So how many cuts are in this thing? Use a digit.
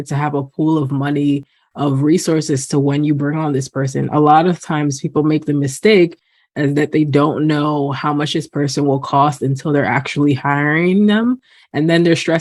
0